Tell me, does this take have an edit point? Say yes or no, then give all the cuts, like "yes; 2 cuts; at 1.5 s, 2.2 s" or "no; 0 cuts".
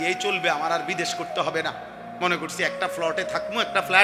no; 0 cuts